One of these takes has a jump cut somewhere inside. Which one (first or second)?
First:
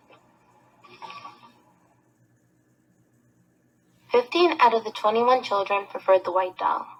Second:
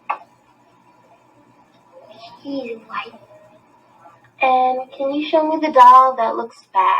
second